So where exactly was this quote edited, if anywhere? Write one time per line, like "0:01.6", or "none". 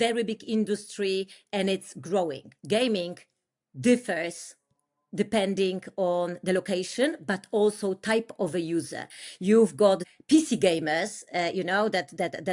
0:02.5
0:10.0